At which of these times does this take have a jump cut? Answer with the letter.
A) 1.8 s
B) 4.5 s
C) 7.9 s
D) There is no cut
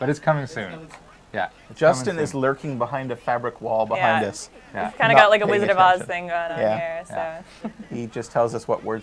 C